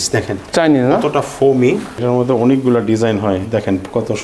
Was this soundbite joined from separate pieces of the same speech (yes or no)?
yes